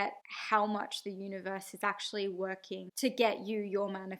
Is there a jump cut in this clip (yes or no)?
yes